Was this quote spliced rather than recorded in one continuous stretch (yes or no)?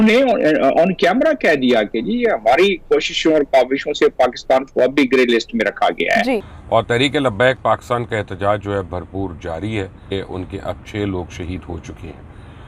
yes